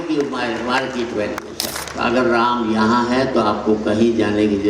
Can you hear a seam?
yes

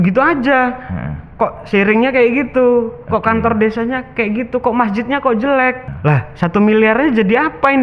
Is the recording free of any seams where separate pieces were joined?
no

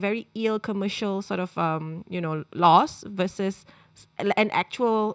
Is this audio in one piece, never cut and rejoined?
yes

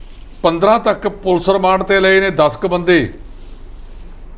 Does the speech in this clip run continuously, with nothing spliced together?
yes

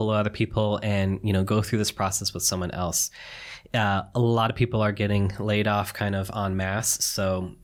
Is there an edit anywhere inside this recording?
no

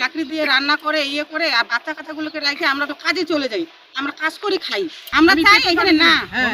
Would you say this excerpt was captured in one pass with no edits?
no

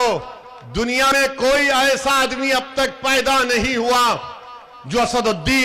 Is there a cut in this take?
yes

